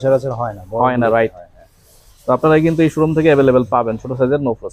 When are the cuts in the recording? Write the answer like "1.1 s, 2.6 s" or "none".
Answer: none